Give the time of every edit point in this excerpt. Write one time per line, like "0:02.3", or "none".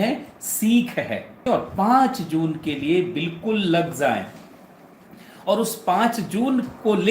0:01.4